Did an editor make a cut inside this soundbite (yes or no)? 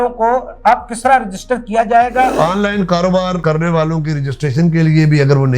yes